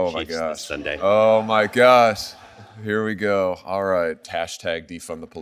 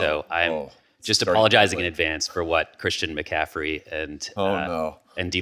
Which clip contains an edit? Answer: first; 1 cut; at 4.2 s

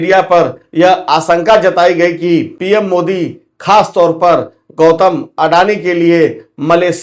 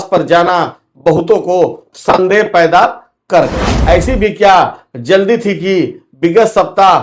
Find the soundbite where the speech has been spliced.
second; 1 cut; at 3.7 s

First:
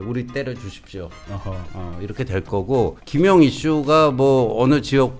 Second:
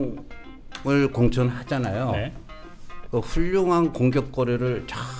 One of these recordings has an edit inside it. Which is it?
first; 1 cut; at 3.0 s

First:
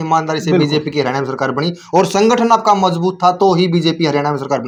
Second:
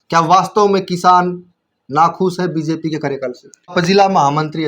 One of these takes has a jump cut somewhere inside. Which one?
second; 1 cut; at 3.7 s

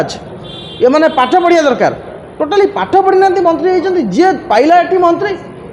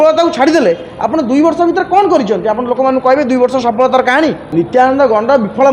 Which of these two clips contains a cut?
second; 1 cut; at 4.4 s

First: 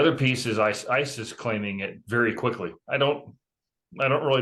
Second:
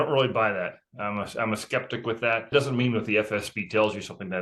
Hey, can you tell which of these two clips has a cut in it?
second; 1 cut; at 2.5 s

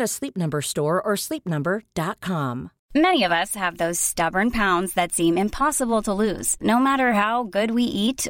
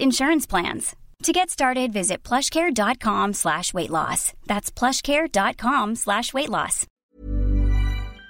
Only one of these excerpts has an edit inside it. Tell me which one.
second; 1 cut; at 7.1 s

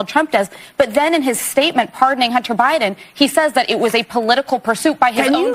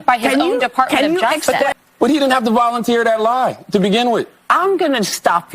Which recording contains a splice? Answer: second; 1 cut; at 1.7 s

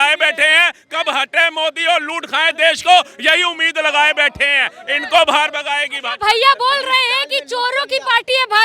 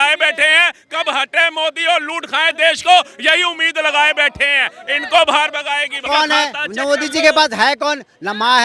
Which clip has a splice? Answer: second; 1 cut; at 6.0 s

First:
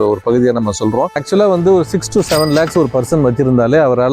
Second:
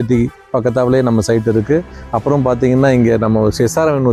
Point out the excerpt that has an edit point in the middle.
first; 1 cut; at 1.2 s

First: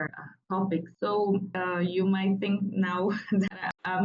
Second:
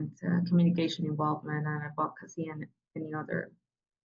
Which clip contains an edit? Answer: first; 2 cuts; at 0.9 s, 1.5 s

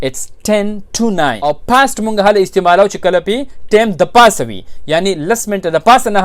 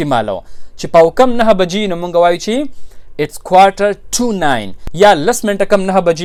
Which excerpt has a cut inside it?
first; 1 cut; at 1.4 s

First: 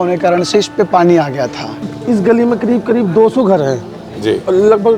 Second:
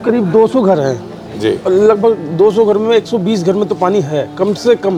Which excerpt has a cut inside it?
first; 1 cut; at 1.9 s

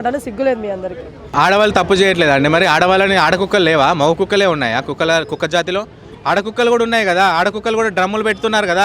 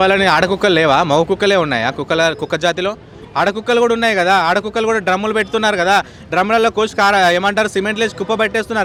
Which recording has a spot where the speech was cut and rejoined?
first; 1 cut; at 1.3 s

